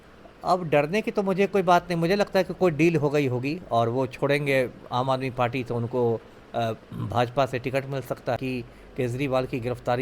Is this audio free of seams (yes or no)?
no